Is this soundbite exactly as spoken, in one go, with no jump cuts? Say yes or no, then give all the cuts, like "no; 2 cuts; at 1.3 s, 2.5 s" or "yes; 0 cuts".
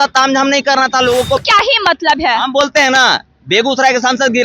no; 1 cut; at 1.4 s